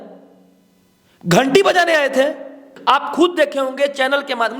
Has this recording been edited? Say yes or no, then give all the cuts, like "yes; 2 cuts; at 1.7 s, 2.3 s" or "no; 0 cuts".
yes; 1 cut; at 2.7 s